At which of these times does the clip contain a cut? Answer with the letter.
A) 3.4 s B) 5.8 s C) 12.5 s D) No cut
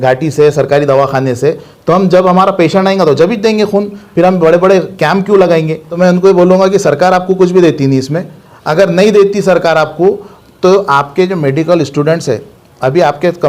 B